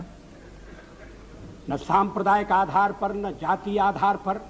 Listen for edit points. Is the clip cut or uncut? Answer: uncut